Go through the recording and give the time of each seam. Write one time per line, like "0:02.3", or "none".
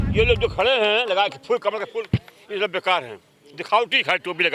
none